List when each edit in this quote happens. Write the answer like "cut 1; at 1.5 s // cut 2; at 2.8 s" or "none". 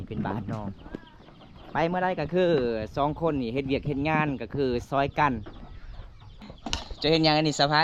cut 1; at 6.4 s